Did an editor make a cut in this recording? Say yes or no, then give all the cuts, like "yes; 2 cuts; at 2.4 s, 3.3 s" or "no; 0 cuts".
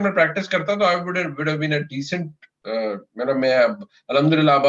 no; 0 cuts